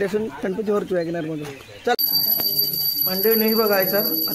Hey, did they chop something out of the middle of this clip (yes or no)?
yes